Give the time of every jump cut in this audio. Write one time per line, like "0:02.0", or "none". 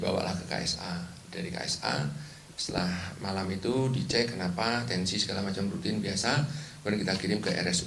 0:01.6